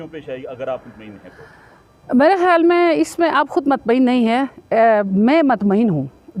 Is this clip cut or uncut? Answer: uncut